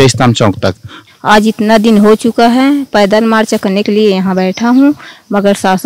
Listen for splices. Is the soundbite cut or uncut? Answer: cut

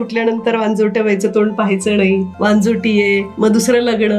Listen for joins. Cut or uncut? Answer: cut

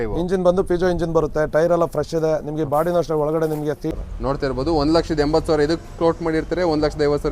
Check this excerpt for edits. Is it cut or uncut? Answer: cut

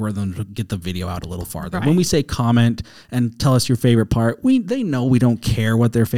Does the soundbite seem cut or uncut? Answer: uncut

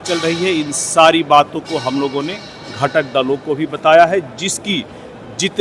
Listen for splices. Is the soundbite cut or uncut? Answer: uncut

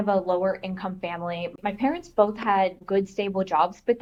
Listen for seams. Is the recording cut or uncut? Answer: uncut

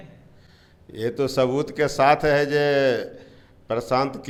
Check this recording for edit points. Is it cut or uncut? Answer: uncut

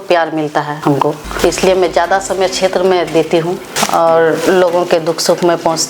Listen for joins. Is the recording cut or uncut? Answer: cut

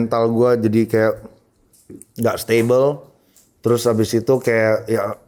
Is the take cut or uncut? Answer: uncut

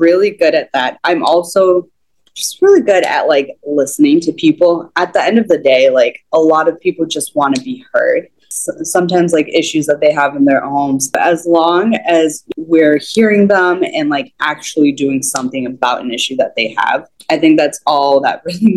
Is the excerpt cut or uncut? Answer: cut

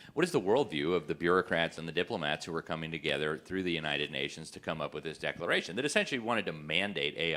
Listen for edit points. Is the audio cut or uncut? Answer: uncut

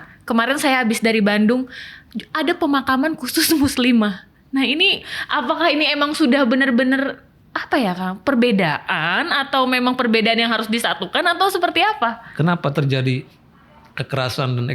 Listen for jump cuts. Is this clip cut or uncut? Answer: cut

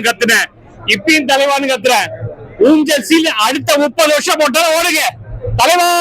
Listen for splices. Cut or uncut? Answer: uncut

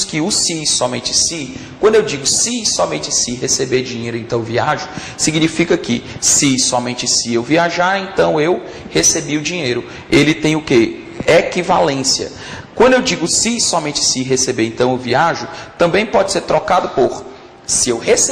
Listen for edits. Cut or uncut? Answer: cut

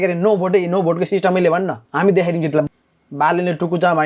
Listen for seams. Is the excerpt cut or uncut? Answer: cut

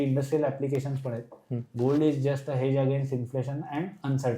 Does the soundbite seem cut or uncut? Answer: uncut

